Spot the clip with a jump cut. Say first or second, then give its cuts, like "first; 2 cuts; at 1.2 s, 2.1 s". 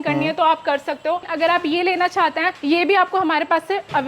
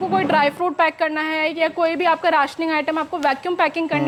first; 2 cuts; at 1.3 s, 2.5 s